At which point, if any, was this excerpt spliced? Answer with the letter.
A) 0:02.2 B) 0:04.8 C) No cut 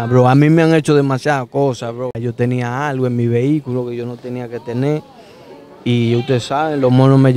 A